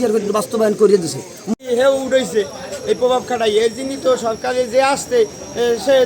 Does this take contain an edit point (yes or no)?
yes